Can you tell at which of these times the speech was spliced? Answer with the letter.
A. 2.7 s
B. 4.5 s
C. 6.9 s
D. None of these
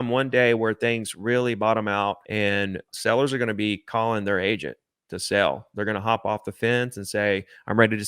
A